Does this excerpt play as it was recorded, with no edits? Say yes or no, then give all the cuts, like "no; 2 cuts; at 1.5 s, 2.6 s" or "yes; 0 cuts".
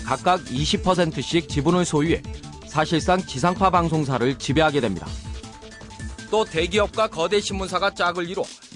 no; 1 cut; at 3.5 s